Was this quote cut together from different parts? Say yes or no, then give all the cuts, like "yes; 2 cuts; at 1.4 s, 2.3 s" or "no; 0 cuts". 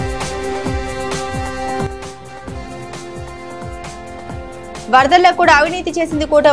no; 0 cuts